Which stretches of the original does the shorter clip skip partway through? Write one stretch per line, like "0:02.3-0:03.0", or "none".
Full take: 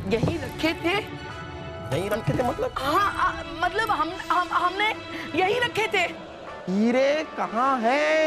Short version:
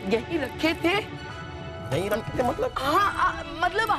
none